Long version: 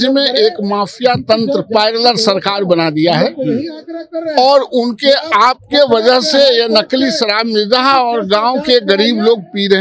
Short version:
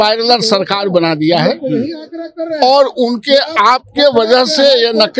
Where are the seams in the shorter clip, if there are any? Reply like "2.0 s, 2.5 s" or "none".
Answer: none